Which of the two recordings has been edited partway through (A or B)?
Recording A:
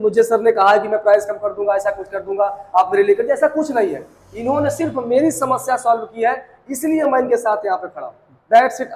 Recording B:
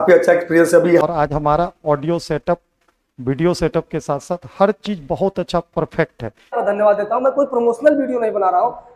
B